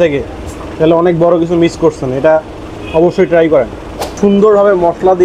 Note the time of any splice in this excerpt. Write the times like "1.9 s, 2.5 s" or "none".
4.1 s